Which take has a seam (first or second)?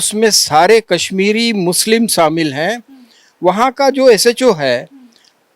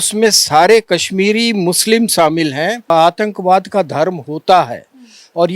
second